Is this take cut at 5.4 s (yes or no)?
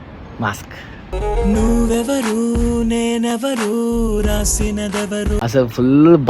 yes